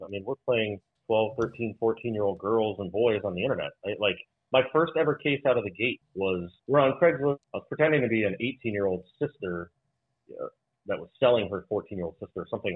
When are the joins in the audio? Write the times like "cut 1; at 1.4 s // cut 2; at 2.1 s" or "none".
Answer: cut 1; at 0.9 s // cut 2; at 6.3 s // cut 3; at 7.5 s